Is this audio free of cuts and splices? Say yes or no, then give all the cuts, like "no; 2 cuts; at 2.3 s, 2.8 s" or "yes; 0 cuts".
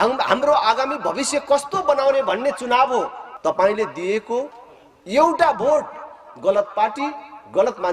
no; 1 cut; at 3.2 s